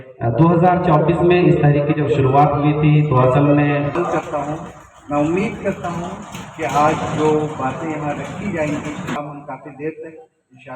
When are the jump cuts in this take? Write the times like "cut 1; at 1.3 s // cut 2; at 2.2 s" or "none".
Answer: cut 1; at 4.0 s // cut 2; at 9.2 s